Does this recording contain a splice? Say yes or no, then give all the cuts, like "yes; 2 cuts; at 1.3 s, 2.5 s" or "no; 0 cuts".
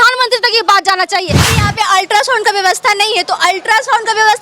yes; 1 cut; at 1.5 s